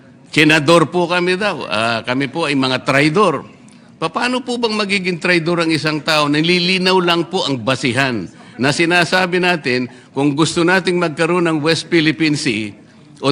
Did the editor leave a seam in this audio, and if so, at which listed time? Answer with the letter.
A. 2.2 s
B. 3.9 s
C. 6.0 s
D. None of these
D